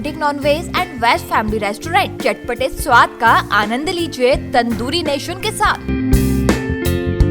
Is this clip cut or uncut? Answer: uncut